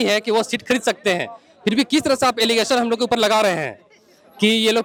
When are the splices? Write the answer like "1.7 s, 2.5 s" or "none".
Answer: none